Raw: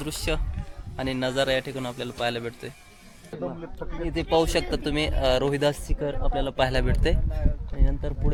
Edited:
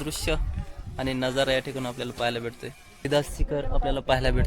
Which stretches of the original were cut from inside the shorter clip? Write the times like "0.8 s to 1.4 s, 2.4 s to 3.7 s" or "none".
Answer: 3.1 s to 5.6 s